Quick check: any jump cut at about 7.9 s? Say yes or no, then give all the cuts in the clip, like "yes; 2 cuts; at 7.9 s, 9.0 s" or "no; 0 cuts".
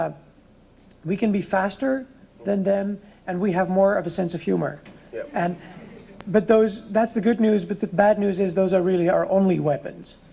no; 1 cut; at 2.9 s